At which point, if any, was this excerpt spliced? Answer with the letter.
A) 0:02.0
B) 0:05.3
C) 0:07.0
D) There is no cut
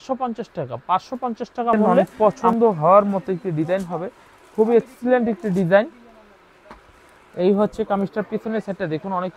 A